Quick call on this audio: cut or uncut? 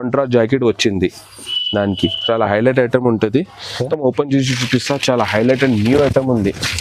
cut